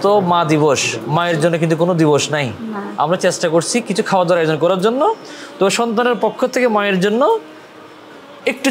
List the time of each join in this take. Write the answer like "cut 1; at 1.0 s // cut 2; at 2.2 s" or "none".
none

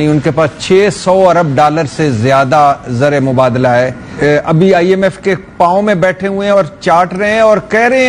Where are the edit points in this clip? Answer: cut 1; at 4.1 s

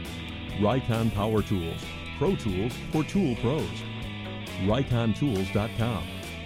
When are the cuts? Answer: none

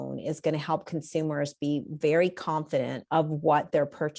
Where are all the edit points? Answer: cut 1; at 3.0 s

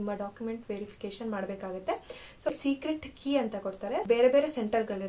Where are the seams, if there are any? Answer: cut 1; at 2.5 s // cut 2; at 4.0 s

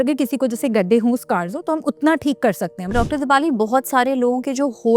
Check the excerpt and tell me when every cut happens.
cut 1; at 2.9 s

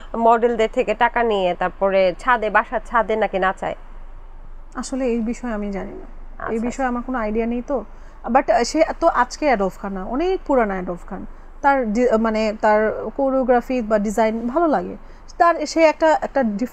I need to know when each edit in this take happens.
none

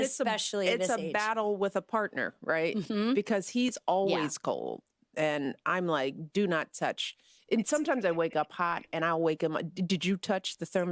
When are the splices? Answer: none

